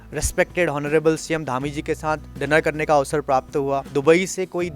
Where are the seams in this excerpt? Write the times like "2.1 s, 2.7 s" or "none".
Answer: 3.9 s

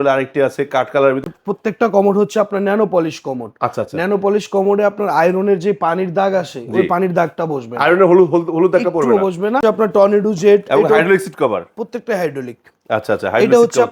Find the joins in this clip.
1.3 s, 9.6 s

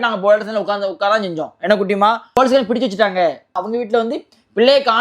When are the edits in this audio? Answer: 2.4 s, 3.6 s

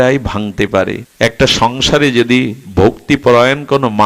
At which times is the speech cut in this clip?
1.0 s

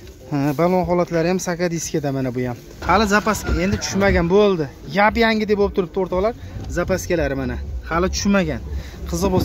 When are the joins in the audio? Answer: 2.7 s

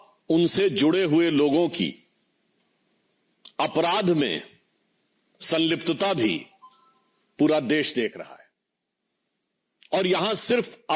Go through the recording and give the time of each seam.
none

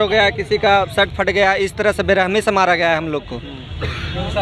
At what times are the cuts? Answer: none

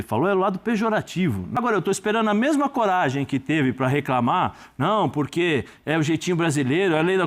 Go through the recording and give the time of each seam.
1.5 s

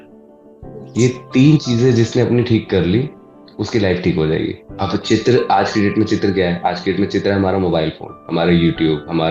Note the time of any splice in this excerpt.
4.6 s

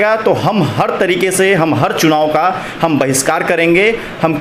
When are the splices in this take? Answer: none

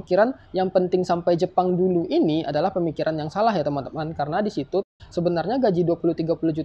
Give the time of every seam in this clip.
4.8 s

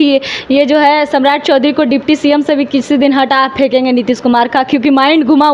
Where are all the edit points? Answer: none

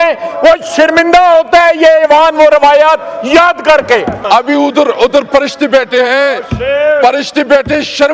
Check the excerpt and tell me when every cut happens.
4.2 s

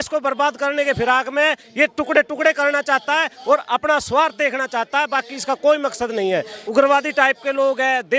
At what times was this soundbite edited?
6.6 s

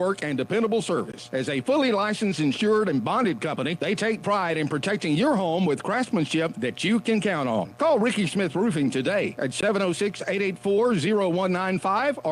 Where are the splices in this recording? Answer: none

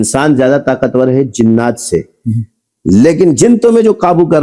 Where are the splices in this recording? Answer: none

